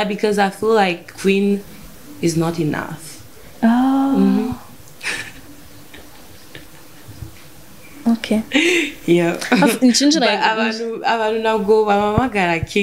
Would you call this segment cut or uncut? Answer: uncut